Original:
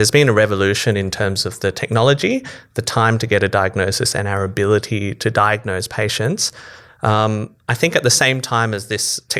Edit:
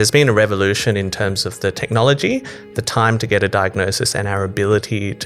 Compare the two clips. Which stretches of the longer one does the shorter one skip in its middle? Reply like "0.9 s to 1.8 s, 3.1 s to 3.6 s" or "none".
none